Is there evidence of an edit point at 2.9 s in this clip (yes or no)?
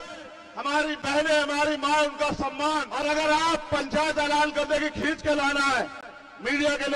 yes